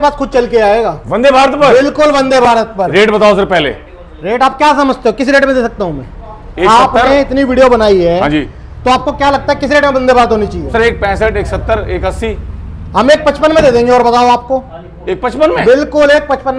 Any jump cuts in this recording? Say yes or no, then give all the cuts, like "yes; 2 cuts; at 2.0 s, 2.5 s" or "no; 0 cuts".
no; 0 cuts